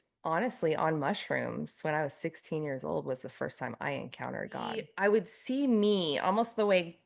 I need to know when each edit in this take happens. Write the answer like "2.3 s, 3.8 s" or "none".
4.9 s